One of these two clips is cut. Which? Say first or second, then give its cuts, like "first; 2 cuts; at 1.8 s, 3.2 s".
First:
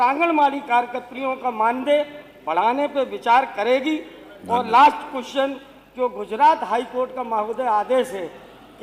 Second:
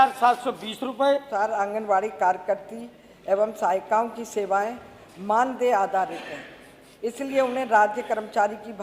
second; 1 cut; at 1.3 s